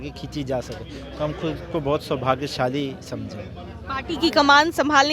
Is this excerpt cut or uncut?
uncut